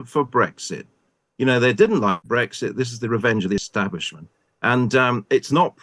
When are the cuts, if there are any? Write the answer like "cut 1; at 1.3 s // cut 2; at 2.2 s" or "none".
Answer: cut 1; at 2.2 s